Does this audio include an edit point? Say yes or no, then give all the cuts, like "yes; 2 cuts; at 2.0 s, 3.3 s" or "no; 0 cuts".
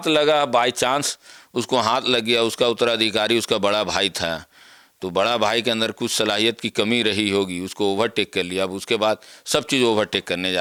no; 0 cuts